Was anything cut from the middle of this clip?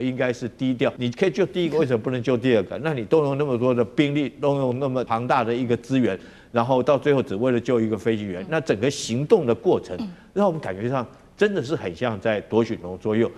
yes; 2 cuts; at 1.0 s, 5.1 s

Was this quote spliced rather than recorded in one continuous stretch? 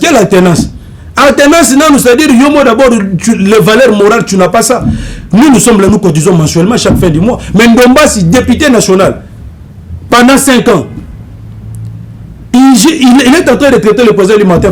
no; 0 cuts

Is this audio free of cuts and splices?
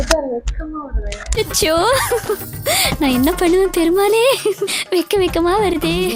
yes; 0 cuts

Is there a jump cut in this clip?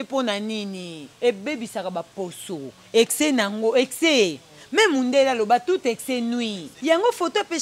yes; 2 cuts; at 1.1 s, 6.7 s

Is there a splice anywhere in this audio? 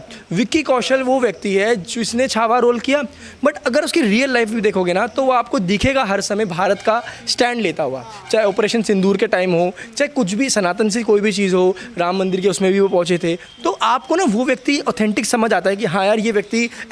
no; 0 cuts

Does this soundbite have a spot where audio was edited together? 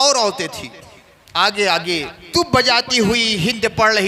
yes; 1 cut; at 2.2 s

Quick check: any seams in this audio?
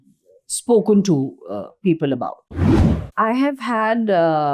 yes; 1 cut; at 2.8 s

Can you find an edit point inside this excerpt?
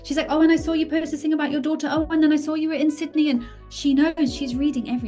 no; 0 cuts

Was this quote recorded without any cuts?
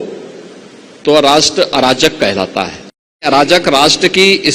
no; 1 cut; at 3.2 s

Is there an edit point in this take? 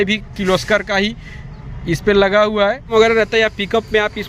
yes; 1 cut; at 2.9 s

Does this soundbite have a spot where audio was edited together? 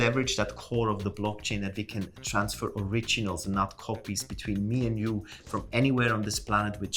no; 0 cuts

